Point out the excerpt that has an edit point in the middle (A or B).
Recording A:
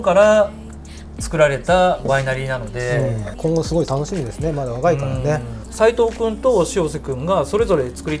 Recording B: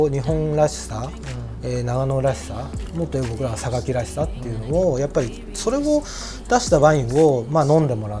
A